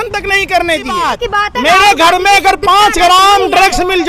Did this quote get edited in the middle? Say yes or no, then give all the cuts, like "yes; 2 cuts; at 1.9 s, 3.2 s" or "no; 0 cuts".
yes; 1 cut; at 1.1 s